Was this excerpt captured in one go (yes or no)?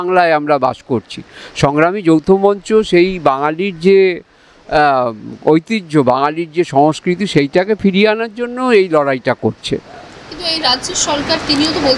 yes